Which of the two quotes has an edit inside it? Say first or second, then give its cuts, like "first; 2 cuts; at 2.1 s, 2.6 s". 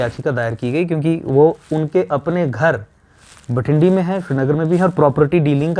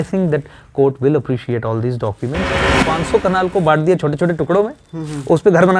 second; 1 cut; at 2.7 s